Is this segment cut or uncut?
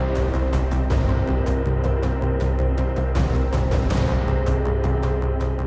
uncut